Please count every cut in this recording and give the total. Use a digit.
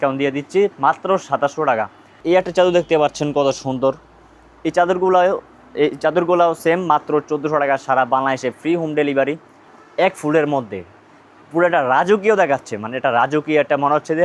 2